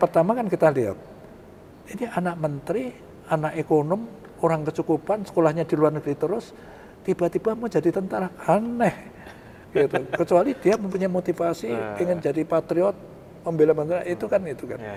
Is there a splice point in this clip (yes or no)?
no